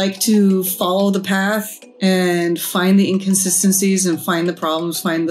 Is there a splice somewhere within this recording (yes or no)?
no